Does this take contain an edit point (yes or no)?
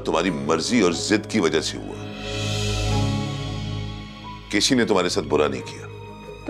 no